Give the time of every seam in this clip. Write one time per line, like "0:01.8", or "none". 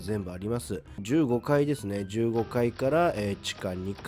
0:01.0